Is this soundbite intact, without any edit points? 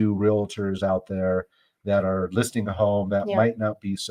yes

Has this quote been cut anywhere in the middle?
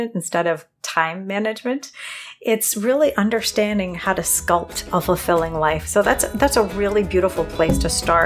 no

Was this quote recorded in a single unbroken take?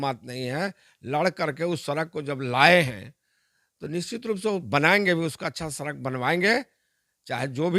yes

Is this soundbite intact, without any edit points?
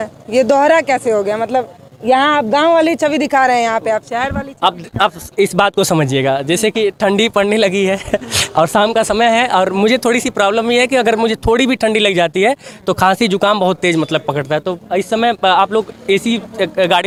yes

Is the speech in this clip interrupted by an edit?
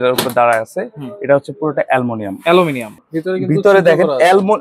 yes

